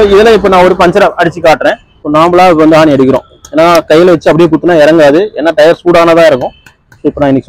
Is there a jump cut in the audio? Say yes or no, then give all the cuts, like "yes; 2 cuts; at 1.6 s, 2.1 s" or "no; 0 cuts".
yes; 1 cut; at 1.9 s